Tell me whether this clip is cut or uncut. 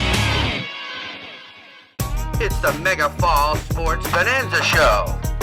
cut